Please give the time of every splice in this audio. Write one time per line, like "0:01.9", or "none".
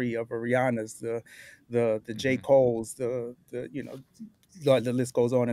none